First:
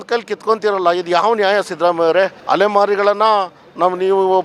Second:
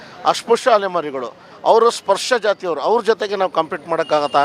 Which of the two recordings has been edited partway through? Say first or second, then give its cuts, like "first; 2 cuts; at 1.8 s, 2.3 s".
first; 1 cut; at 2.4 s